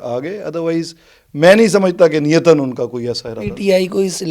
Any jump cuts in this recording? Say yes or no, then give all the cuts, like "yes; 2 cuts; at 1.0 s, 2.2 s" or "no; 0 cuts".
no; 0 cuts